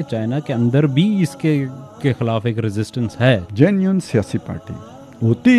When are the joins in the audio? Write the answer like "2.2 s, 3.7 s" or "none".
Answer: 3.5 s